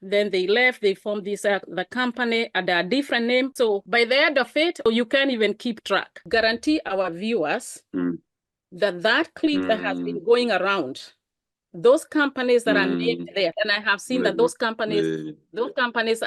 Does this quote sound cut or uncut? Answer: cut